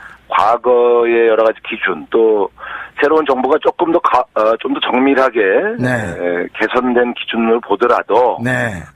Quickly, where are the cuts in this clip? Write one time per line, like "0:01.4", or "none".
0:03.1